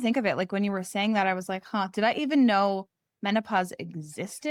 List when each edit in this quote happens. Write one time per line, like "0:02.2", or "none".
none

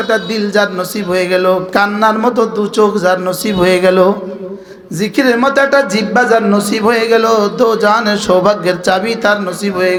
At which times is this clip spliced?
none

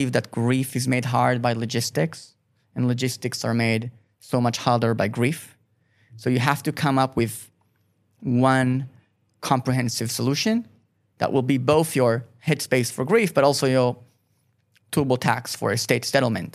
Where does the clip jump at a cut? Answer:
none

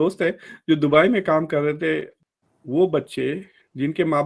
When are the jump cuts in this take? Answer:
0:02.1

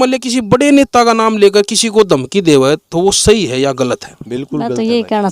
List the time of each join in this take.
0:04.1

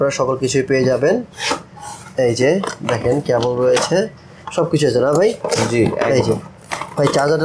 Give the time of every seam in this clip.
none

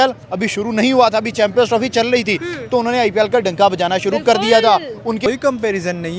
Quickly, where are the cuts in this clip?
0:05.2

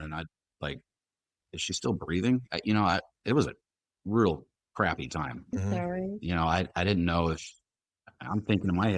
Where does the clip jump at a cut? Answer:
none

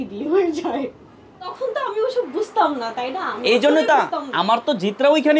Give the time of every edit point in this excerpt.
0:01.5

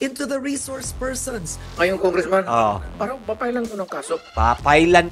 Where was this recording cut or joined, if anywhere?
0:01.6
0:02.9

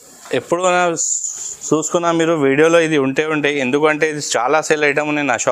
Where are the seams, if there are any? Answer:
none

